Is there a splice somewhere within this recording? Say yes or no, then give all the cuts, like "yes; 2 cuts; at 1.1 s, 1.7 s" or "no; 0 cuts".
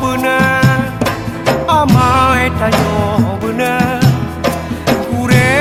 no; 0 cuts